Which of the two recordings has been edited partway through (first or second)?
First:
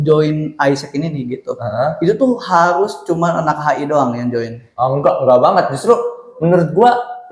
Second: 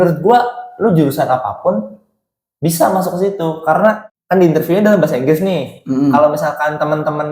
second